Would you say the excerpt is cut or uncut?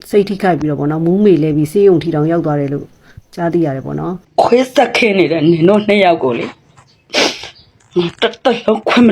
cut